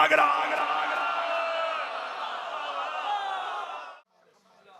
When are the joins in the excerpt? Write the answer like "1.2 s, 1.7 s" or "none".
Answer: 3.8 s